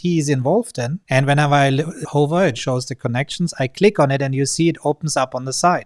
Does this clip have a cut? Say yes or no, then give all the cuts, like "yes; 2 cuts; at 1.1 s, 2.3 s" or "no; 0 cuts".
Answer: yes; 1 cut; at 2.0 s